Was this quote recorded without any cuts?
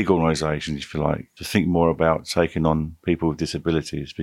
no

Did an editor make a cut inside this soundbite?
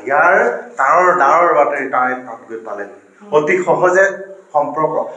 no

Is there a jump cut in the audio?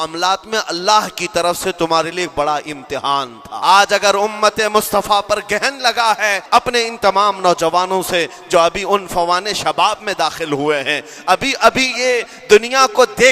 yes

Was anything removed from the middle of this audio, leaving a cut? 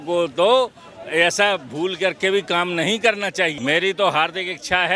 yes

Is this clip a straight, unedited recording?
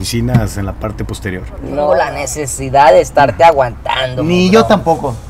no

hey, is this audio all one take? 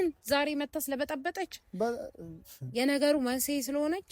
yes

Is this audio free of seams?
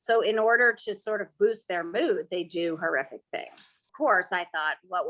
no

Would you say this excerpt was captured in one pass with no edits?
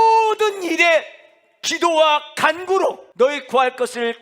no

